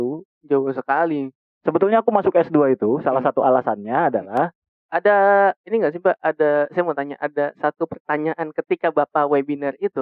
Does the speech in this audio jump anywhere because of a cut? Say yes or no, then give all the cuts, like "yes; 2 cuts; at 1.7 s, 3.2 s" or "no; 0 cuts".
yes; 1 cut; at 4.7 s